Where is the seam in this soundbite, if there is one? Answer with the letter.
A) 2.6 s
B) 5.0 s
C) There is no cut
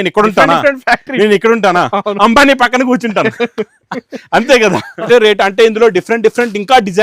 B